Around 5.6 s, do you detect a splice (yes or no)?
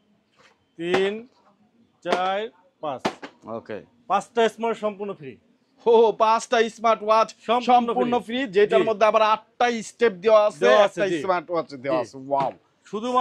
no